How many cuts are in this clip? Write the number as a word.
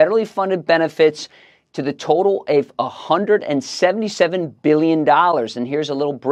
zero